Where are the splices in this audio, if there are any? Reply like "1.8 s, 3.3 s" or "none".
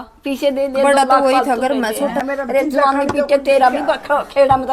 2.2 s